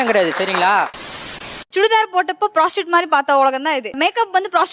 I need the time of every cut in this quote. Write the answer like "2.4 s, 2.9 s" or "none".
1.5 s, 4.0 s